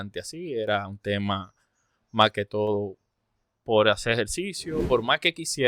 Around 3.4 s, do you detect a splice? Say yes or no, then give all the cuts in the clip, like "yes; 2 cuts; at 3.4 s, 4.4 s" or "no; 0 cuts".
no; 1 cut; at 4.7 s